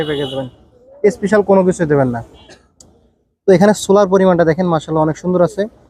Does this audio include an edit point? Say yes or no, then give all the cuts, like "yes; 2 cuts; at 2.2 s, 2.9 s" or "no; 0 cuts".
no; 0 cuts